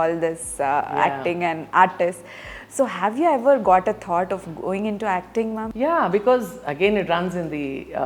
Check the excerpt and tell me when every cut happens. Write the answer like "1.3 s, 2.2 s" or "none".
5.7 s